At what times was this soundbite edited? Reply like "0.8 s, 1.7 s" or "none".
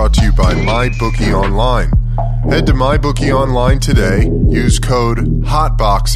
none